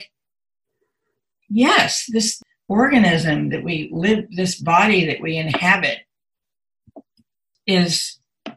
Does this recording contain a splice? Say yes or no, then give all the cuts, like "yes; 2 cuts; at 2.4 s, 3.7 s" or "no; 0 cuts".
yes; 2 cuts; at 2.4 s, 7.5 s